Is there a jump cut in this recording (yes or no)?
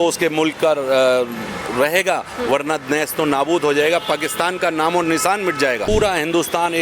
yes